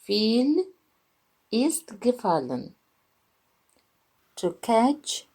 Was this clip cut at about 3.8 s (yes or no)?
yes